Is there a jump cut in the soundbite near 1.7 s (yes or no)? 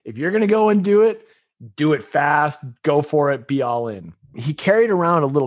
no